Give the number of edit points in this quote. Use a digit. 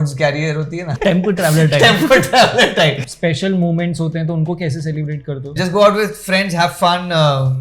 3